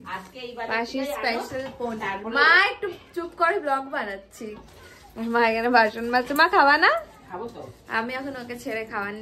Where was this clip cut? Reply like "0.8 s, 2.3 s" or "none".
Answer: none